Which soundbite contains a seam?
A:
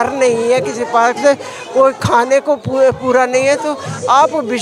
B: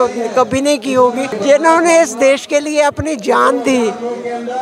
B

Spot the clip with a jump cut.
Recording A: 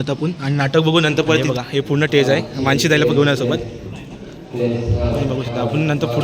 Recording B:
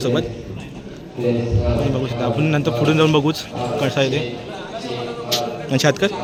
A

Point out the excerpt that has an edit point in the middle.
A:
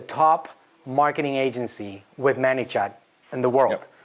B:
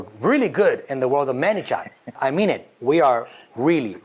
B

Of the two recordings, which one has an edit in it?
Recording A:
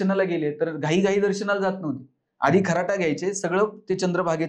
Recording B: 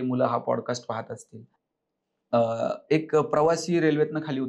B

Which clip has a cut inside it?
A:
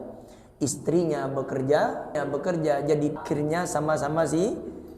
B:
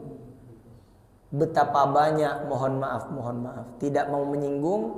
A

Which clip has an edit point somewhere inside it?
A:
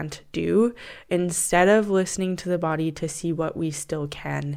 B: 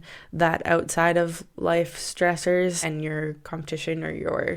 B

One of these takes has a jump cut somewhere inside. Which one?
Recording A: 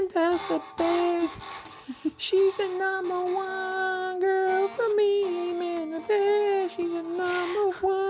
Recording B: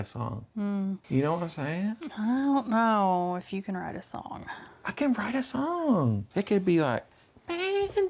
B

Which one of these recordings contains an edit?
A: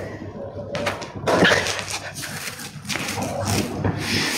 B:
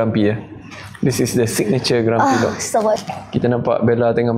B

